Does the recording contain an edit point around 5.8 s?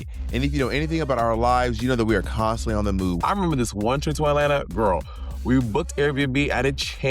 no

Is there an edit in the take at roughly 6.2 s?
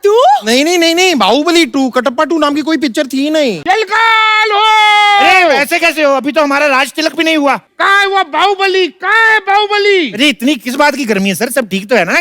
no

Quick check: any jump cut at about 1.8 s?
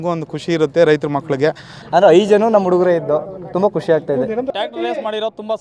yes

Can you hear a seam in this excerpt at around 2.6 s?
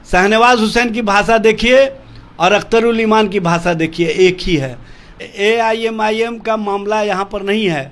no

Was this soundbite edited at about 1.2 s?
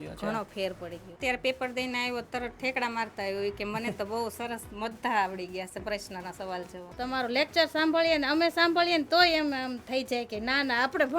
yes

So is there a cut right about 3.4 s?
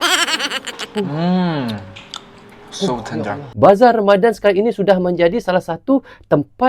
yes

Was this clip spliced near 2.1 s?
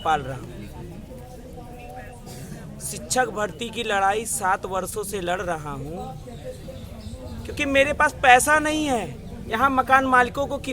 no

